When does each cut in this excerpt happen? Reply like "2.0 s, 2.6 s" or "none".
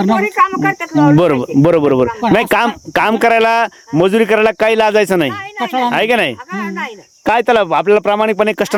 none